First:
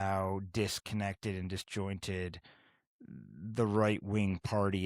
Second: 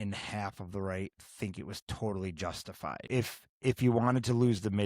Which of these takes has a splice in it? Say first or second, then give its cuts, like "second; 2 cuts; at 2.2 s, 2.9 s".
second; 1 cut; at 3.1 s